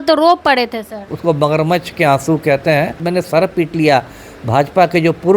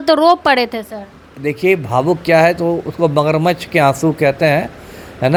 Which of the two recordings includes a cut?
first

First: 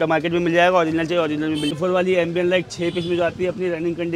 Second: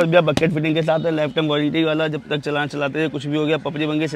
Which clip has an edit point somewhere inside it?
first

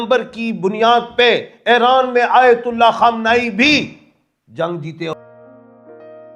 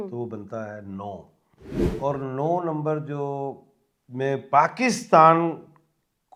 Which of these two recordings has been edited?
first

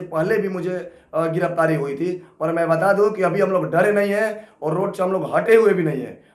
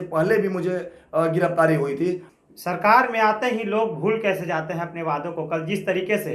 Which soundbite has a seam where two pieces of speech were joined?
second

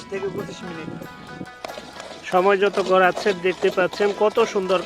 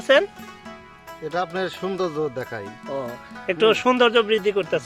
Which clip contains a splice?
first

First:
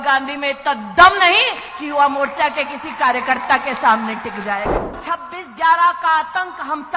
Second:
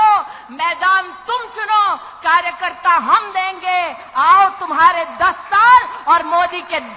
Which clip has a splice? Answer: first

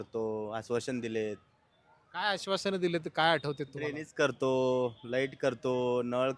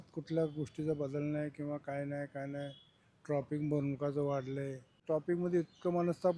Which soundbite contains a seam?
second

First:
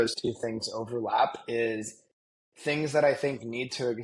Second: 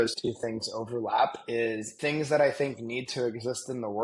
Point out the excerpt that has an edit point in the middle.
second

